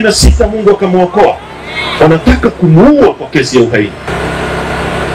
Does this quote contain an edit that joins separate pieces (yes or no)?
yes